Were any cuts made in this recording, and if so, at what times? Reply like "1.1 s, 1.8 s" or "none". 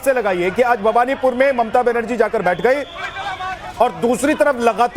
1.7 s